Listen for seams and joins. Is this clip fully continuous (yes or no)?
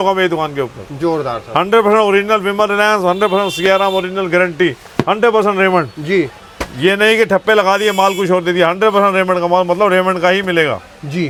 yes